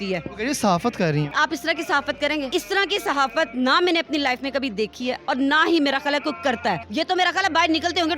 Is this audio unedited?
no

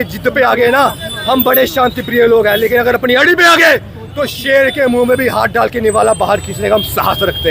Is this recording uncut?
yes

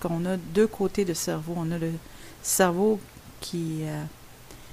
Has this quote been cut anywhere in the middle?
no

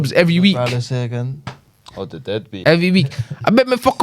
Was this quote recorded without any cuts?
no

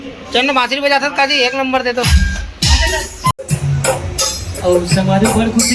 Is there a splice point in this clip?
yes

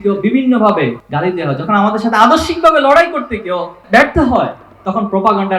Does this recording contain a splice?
yes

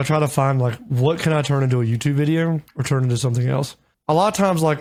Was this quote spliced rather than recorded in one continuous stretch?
no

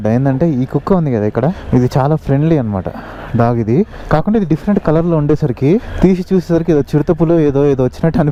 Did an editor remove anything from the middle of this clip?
no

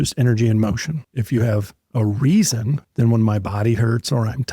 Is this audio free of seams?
no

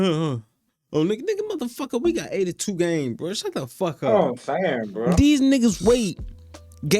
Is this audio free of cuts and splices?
no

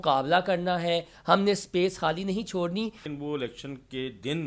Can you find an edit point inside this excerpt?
yes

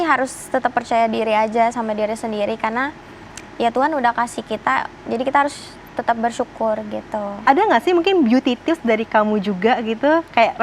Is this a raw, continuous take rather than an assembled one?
no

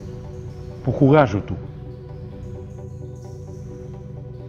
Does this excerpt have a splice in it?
yes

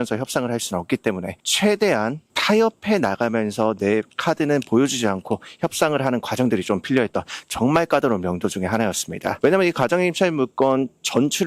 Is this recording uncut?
yes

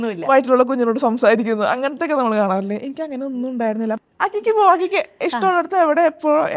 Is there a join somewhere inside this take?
yes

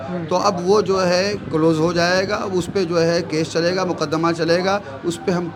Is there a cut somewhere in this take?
no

